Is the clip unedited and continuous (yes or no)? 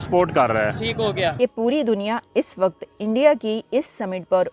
no